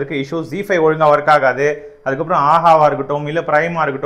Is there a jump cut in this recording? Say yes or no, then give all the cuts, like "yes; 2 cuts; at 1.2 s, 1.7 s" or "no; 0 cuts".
no; 0 cuts